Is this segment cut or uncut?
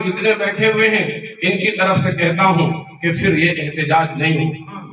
uncut